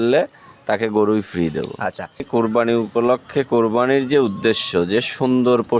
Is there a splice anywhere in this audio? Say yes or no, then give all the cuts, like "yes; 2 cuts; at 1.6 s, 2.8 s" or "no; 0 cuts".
yes; 1 cut; at 2.3 s